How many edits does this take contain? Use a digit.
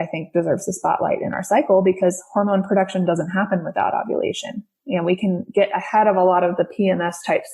0